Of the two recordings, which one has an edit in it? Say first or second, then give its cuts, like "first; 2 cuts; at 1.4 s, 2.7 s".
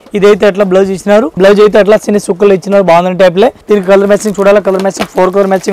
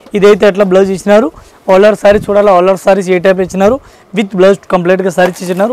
first; 2 cuts; at 1.3 s, 3.6 s